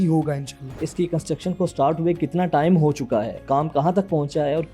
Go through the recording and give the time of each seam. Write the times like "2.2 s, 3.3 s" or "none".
0.8 s, 3.4 s